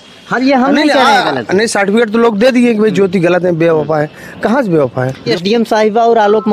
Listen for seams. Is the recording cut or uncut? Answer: cut